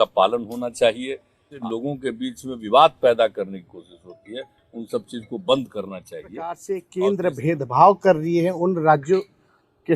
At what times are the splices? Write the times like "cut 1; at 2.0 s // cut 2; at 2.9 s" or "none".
cut 1; at 1.6 s // cut 2; at 6.6 s